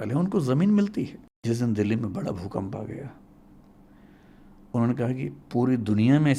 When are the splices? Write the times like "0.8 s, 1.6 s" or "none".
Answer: 1.3 s